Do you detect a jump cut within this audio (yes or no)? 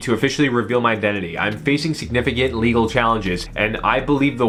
no